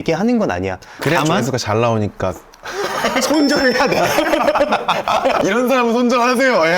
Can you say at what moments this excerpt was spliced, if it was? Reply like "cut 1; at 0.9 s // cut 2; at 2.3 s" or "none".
cut 1; at 5.4 s

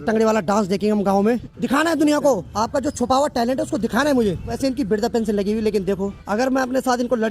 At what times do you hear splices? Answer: cut 1; at 1.5 s // cut 2; at 2.5 s // cut 3; at 4.5 s // cut 4; at 6.2 s

